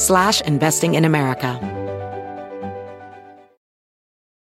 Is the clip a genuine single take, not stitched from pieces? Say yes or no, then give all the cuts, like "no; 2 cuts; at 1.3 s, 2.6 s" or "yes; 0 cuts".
no; 1 cut; at 1.6 s